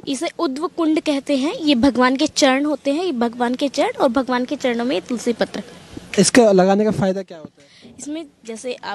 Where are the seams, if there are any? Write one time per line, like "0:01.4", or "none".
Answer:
none